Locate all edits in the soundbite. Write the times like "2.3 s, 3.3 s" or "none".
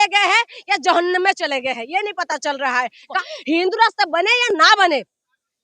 3.1 s

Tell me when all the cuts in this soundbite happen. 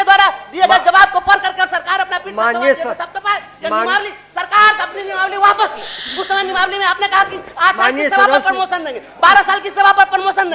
6.0 s

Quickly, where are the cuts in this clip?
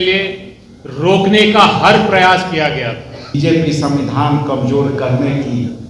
3.4 s

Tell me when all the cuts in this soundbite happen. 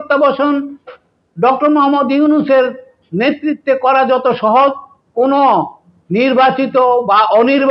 none

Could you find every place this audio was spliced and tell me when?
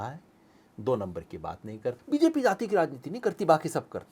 2.0 s

